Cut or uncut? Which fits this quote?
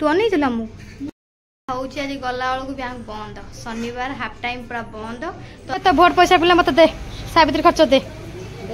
cut